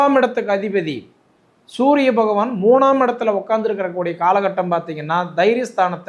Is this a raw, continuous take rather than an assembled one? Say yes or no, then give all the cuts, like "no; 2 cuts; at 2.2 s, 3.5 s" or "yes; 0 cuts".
yes; 0 cuts